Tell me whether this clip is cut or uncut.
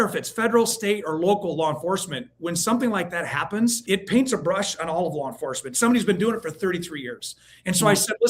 cut